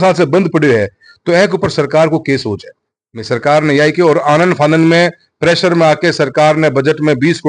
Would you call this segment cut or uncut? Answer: uncut